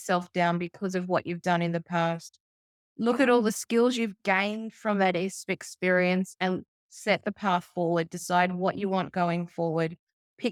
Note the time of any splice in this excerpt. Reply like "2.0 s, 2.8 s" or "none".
none